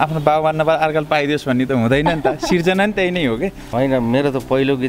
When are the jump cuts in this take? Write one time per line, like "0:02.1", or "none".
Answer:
0:03.6